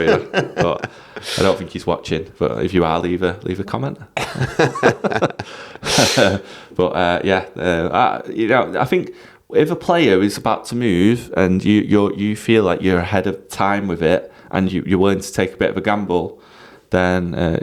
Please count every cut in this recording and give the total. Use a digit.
0